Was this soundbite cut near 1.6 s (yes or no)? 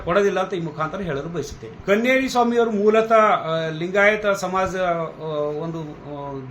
yes